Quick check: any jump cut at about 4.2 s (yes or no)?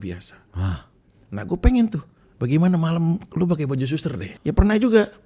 yes